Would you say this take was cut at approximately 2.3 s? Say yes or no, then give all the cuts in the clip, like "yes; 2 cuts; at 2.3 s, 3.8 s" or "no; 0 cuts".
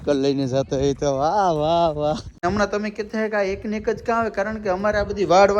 yes; 1 cut; at 2.3 s